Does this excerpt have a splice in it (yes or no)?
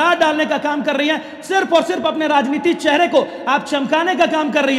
no